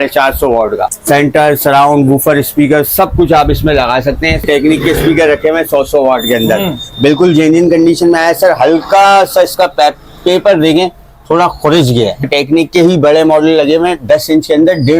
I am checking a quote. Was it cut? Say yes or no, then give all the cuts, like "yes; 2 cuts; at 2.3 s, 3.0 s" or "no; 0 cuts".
yes; 3 cuts; at 1.0 s, 4.4 s, 12.2 s